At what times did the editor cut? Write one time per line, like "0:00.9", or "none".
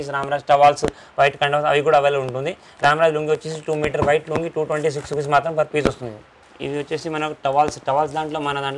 none